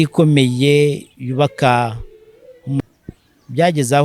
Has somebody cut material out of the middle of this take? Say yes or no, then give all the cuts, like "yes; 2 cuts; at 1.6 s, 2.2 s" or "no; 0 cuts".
yes; 1 cut; at 2.8 s